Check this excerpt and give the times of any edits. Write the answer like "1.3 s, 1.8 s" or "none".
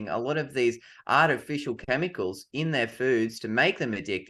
none